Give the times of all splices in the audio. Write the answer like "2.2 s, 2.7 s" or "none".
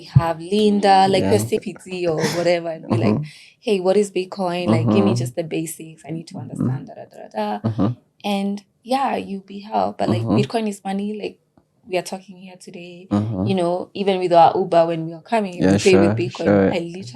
1.6 s